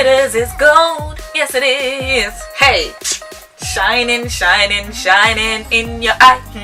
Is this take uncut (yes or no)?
yes